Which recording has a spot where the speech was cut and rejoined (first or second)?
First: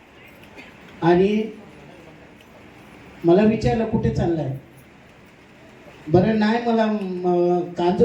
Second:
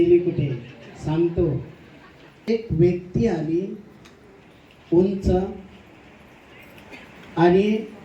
second